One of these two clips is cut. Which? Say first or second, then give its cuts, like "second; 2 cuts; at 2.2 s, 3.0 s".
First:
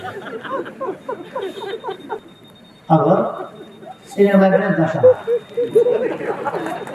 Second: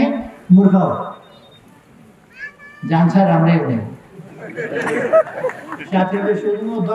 first; 1 cut; at 2.2 s